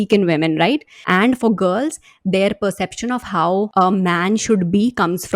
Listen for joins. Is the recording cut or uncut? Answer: cut